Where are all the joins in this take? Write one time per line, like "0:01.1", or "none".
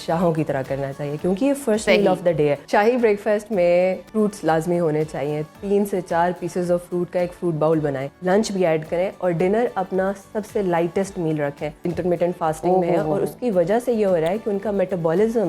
0:02.6
0:04.0
0:08.0
0:11.8